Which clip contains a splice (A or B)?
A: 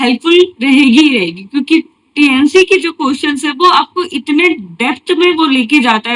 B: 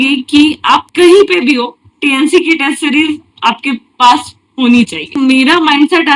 B